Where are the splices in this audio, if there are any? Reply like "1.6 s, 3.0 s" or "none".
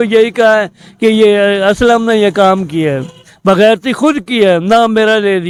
none

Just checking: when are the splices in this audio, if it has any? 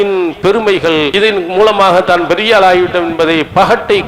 1.1 s

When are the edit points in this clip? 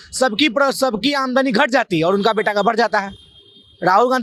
none

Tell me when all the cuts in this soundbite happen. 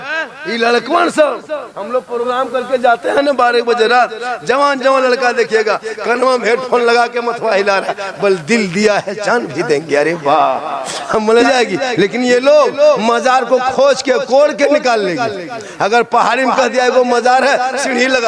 11.4 s

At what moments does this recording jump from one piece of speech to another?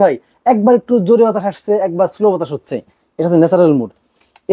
none

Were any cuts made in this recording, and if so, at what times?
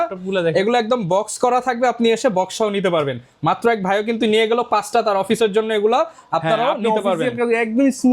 none

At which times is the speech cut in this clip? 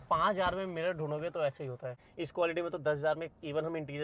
2.0 s

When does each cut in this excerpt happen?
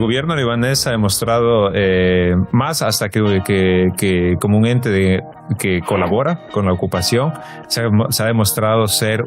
none

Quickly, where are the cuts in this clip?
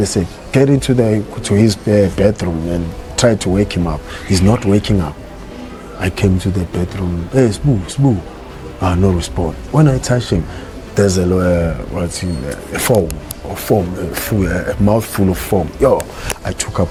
none

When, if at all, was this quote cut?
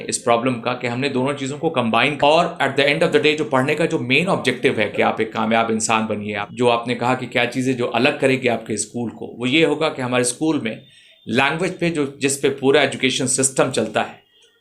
2.2 s, 6.5 s

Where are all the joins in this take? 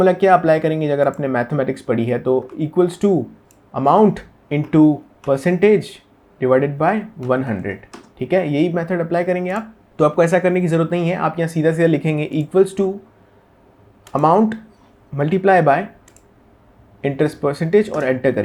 none

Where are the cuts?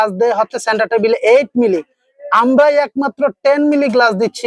none

